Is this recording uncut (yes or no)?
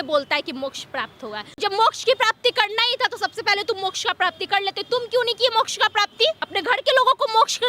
no